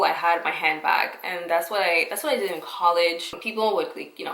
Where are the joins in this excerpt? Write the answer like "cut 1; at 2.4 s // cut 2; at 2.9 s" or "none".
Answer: cut 1; at 3.3 s